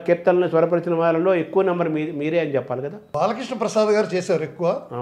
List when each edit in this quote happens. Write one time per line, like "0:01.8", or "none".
0:03.1